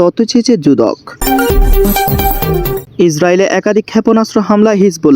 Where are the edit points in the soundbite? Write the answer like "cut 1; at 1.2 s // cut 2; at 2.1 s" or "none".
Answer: cut 1; at 1.1 s // cut 2; at 2.8 s